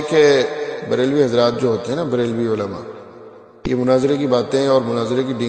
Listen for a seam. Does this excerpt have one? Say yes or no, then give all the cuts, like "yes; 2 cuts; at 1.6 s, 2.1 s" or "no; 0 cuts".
no; 0 cuts